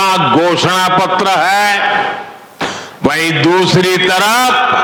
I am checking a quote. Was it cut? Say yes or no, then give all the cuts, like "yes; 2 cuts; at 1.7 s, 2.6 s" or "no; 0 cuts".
no; 0 cuts